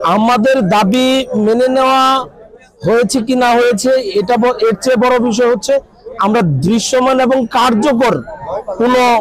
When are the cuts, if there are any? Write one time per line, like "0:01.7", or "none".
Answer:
none